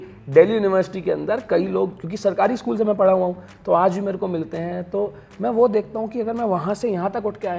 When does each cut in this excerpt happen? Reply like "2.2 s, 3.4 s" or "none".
none